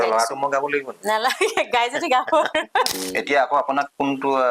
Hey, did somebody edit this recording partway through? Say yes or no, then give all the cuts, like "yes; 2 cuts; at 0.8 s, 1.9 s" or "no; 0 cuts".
yes; 1 cut; at 2.9 s